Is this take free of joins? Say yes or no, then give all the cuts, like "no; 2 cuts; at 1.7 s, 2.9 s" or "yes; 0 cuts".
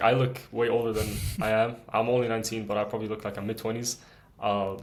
yes; 0 cuts